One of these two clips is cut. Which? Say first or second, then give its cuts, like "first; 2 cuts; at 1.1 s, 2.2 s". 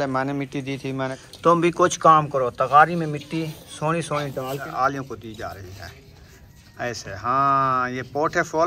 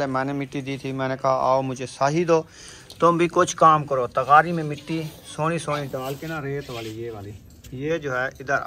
first; 2 cuts; at 1.1 s, 4.7 s